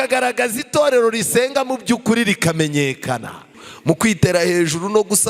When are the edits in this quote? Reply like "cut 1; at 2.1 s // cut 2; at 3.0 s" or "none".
cut 1; at 3.7 s